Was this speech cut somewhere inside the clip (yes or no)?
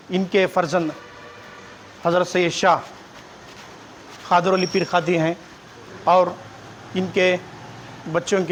no